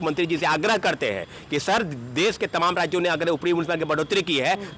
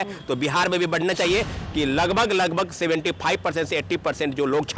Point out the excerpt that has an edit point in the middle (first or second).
second